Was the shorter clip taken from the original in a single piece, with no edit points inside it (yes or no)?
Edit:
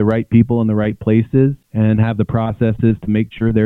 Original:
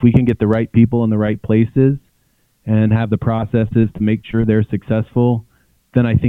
no